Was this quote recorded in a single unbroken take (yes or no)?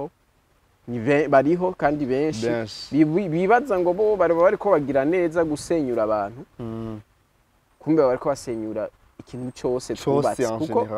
yes